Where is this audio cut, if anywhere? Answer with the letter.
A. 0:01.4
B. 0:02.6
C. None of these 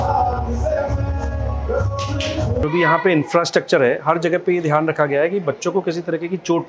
B